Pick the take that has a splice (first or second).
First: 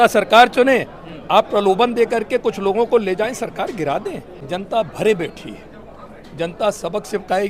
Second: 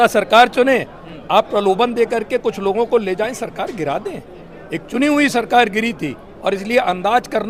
first